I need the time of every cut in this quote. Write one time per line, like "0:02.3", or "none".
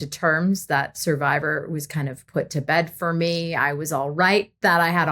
none